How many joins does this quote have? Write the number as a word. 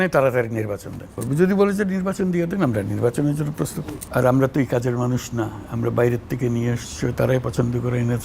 two